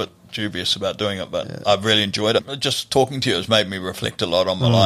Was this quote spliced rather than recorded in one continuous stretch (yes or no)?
yes